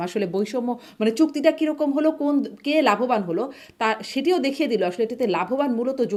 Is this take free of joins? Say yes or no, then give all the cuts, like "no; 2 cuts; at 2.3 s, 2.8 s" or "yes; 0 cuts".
yes; 0 cuts